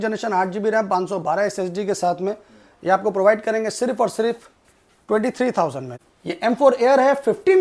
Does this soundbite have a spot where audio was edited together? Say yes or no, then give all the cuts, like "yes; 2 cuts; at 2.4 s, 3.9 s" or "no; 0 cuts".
yes; 1 cut; at 5.9 s